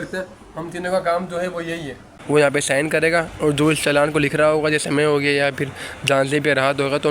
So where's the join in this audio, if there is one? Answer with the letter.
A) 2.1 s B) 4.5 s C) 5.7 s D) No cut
A